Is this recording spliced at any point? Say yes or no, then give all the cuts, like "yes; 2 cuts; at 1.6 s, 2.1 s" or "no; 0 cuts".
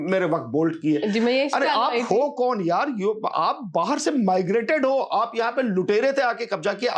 no; 0 cuts